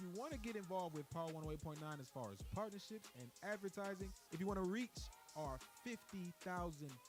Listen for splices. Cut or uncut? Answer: uncut